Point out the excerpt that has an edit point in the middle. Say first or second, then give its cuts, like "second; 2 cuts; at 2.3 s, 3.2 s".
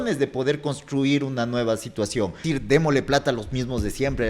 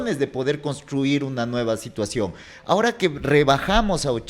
first; 1 cut; at 2.5 s